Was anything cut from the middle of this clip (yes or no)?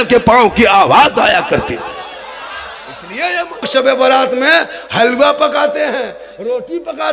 yes